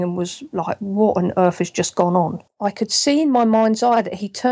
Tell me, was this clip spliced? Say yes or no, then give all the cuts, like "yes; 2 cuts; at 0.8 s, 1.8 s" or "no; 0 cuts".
yes; 1 cut; at 2.5 s